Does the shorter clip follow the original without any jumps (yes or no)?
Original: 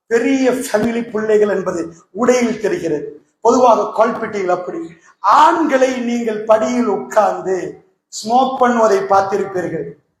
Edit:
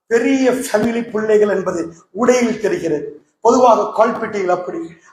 yes